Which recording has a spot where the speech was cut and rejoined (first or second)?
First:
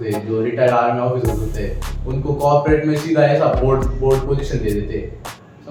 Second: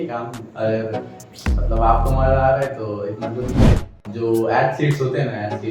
second